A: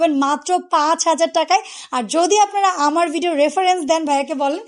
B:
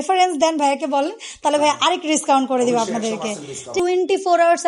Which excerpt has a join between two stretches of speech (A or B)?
B